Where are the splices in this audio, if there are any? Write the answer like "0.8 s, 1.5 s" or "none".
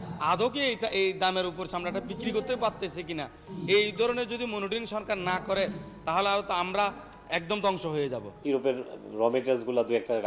3.4 s, 8.3 s